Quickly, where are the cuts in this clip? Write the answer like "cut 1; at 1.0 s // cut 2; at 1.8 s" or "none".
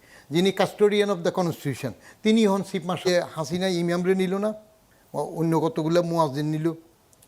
cut 1; at 3.1 s